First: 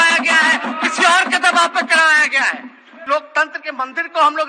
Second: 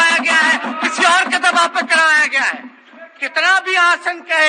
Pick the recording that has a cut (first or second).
first